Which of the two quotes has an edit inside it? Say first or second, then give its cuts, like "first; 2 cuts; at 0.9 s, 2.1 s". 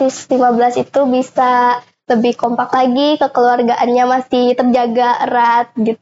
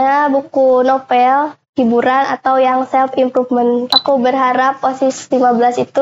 second; 1 cut; at 3.9 s